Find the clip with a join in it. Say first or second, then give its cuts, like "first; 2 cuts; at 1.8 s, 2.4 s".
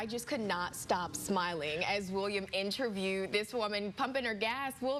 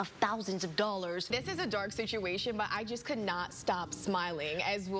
second; 1 cut; at 1.2 s